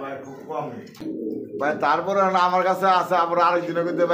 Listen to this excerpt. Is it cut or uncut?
cut